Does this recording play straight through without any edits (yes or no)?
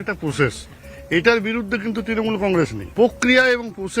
no